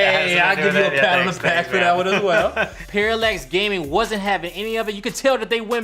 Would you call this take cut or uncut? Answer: cut